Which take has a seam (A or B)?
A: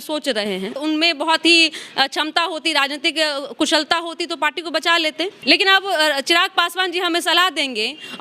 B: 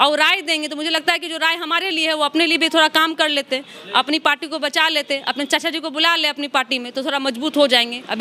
A